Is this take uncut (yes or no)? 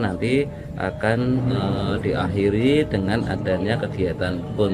yes